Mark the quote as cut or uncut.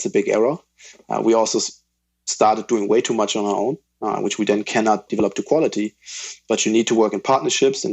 cut